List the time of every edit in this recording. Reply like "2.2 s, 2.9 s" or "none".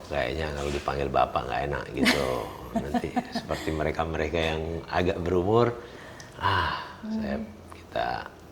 none